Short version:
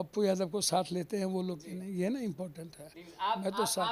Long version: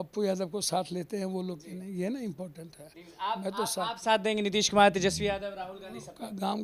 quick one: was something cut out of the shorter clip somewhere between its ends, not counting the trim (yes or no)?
no